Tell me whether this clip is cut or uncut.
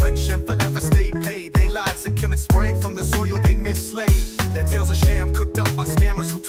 uncut